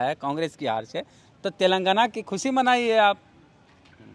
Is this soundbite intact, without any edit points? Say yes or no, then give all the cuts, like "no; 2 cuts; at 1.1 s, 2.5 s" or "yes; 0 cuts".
yes; 0 cuts